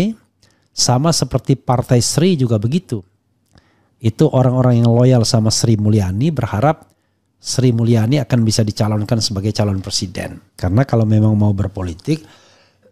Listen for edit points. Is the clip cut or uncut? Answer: cut